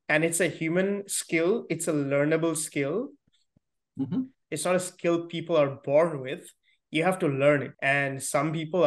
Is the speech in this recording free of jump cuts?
no; 2 cuts; at 4.4 s, 7.7 s

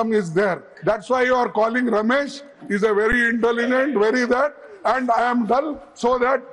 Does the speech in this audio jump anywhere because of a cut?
no; 0 cuts

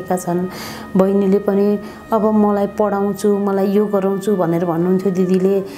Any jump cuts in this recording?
no; 0 cuts

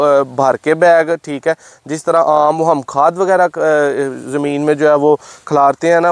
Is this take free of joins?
yes; 0 cuts

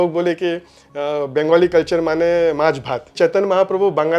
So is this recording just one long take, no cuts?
no; 1 cut; at 3.1 s

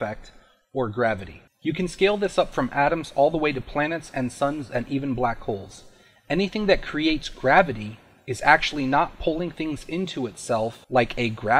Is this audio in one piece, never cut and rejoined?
no; 1 cut; at 1.5 s

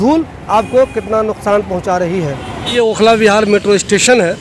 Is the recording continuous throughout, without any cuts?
yes; 0 cuts

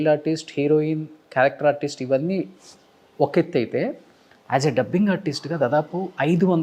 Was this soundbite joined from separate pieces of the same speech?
no; 0 cuts

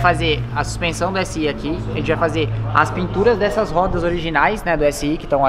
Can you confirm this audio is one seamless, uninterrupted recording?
yes; 0 cuts

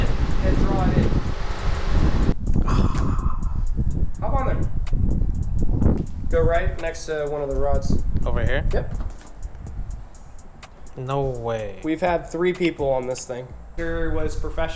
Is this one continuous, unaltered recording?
no; 2 cuts; at 2.4 s, 13.7 s

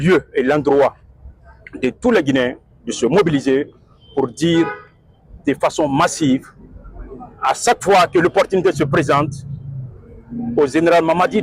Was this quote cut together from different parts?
no; 0 cuts

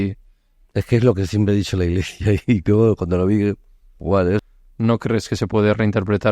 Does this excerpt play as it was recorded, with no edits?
no; 1 cut; at 4.4 s

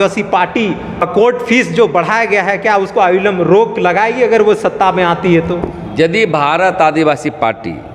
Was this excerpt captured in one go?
no; 1 cut; at 1.1 s

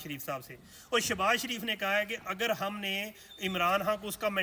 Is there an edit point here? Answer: no; 0 cuts

